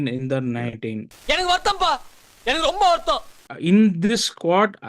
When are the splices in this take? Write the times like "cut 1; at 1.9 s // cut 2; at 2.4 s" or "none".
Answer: cut 1; at 1.1 s // cut 2; at 3.4 s